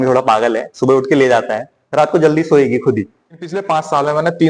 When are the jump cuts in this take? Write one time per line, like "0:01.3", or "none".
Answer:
0:03.6